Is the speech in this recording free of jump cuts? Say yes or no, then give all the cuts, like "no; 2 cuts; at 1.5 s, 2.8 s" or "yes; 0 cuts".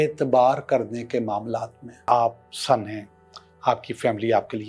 no; 1 cut; at 2.1 s